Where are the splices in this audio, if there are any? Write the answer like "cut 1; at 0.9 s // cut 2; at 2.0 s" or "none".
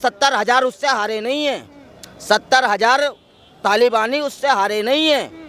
none